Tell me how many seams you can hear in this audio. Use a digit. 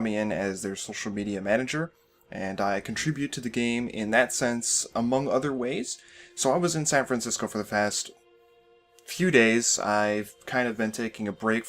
1